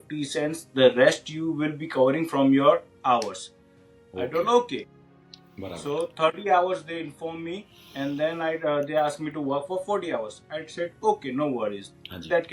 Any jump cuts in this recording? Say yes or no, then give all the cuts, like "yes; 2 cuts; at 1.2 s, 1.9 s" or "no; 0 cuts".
no; 0 cuts